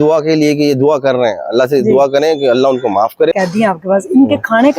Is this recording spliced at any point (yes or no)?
yes